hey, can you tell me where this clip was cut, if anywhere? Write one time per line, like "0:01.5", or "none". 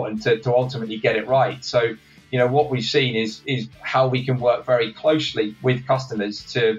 none